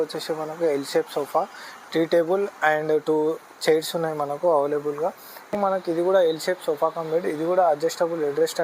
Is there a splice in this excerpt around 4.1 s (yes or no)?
no